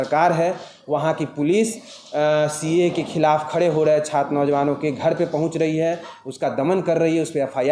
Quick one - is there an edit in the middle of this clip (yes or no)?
no